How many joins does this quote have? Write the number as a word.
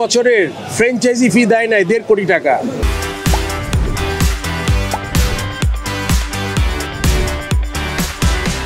zero